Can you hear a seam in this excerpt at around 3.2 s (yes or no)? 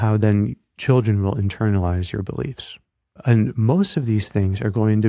yes